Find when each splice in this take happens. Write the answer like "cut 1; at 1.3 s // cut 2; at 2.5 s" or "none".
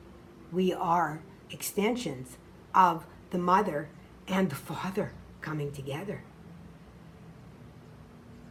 none

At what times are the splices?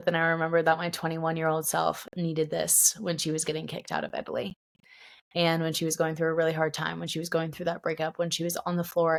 none

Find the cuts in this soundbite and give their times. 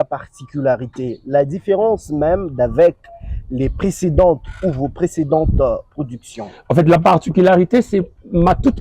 none

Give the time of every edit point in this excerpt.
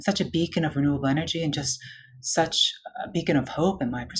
none

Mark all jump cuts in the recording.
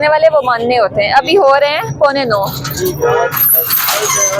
none

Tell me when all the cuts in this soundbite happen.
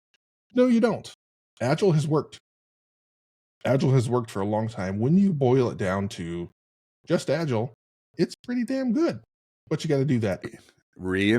cut 1; at 10.5 s

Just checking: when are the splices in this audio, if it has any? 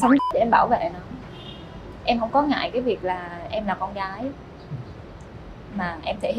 none

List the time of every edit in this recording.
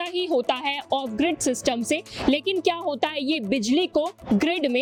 none

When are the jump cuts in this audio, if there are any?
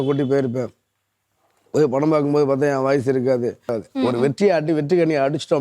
cut 1; at 3.7 s

